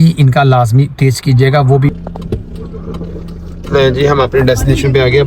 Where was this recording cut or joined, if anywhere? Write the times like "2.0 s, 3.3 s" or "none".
1.9 s